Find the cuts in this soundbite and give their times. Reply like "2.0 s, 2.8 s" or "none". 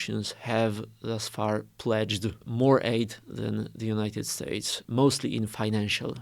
2.4 s, 4.7 s